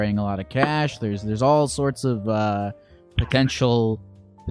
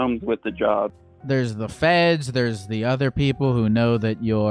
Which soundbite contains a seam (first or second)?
second